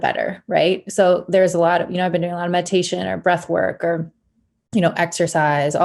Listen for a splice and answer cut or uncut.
uncut